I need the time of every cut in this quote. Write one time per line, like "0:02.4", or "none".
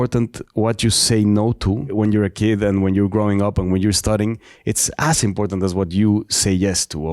0:01.9